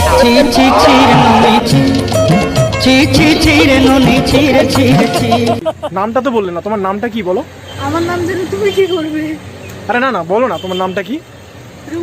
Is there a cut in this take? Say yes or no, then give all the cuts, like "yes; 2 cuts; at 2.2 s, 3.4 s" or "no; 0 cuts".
yes; 1 cut; at 5.9 s